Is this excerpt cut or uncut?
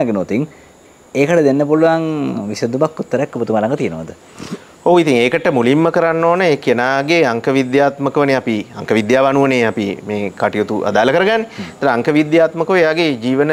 uncut